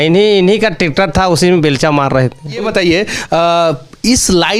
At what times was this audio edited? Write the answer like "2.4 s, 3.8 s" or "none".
2.7 s